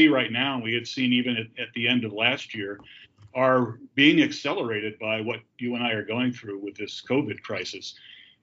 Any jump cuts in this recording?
no; 0 cuts

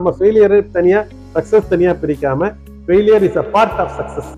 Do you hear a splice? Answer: no; 0 cuts

